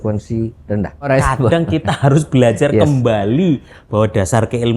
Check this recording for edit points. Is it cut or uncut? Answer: cut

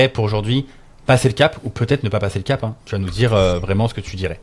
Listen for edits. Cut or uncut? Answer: uncut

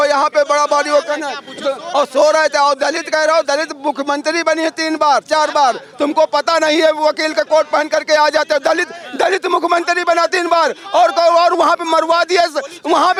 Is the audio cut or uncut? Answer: uncut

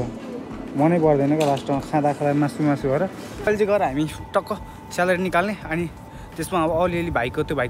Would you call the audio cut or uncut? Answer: cut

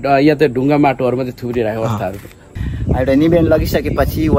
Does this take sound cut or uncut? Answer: cut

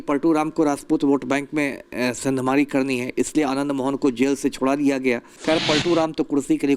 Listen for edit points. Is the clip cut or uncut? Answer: cut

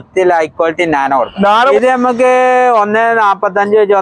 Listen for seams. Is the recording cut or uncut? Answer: cut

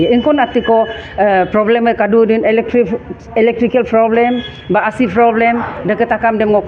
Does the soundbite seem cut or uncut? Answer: uncut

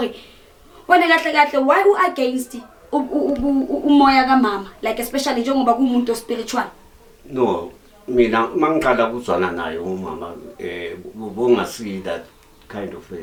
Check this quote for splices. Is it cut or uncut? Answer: uncut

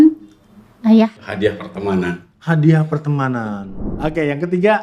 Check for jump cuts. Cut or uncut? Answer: cut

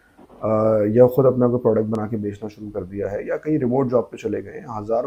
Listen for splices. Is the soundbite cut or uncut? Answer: uncut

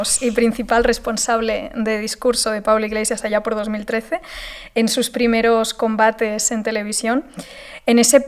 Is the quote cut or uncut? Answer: uncut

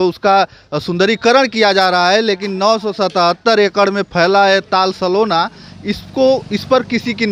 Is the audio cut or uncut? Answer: uncut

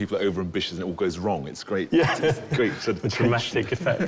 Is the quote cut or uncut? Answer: uncut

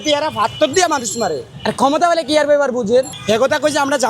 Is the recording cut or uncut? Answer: uncut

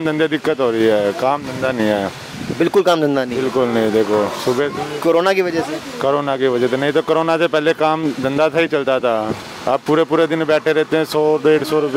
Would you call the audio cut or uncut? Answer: uncut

